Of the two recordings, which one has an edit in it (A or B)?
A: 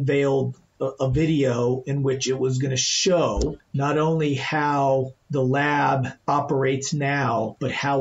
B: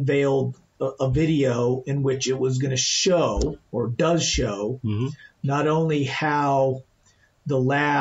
A